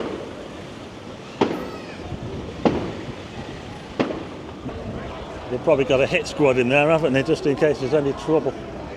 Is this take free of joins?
no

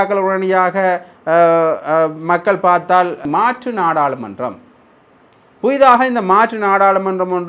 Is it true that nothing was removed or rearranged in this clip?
no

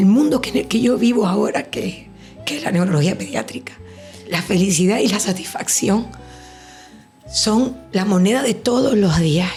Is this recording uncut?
yes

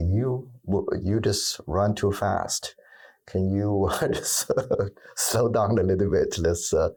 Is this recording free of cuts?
yes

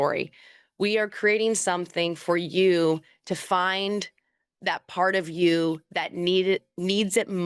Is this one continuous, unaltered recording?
yes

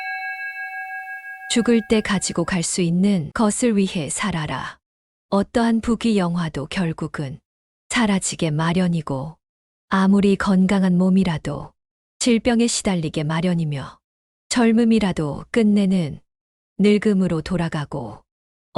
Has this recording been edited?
yes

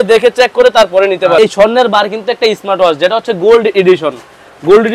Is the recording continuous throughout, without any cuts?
no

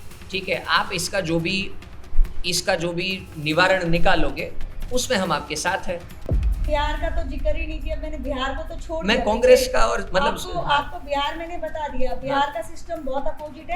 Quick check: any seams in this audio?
yes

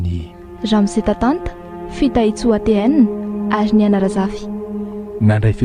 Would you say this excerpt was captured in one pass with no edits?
yes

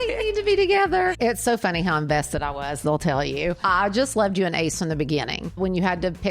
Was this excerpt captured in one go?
no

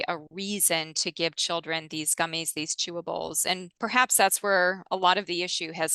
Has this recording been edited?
yes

